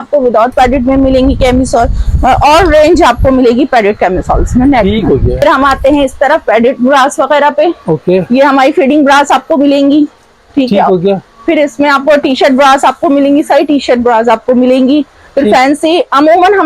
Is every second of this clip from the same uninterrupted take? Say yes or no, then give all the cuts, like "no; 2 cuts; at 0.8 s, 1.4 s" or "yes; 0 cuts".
yes; 0 cuts